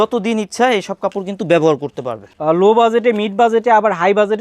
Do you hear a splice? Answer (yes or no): yes